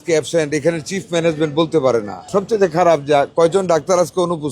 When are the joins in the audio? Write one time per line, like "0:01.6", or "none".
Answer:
0:02.2